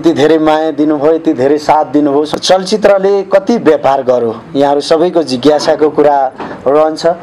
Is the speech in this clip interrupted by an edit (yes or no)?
yes